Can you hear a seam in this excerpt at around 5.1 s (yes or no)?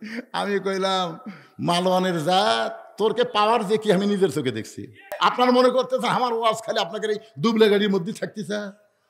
yes